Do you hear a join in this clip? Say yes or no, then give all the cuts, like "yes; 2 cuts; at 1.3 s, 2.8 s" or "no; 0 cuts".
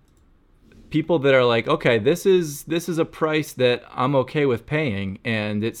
no; 0 cuts